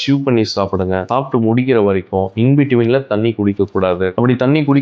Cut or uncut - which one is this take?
cut